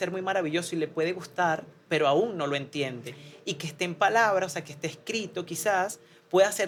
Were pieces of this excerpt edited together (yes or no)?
no